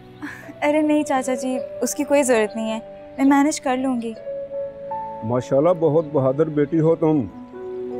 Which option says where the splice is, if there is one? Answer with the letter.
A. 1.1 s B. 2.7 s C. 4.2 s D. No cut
D